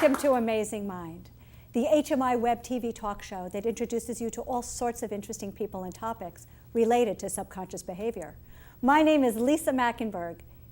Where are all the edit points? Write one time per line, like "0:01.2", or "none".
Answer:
0:08.6